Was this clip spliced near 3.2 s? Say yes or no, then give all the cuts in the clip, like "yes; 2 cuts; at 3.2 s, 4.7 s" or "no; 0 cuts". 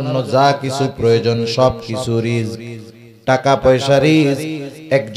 no; 0 cuts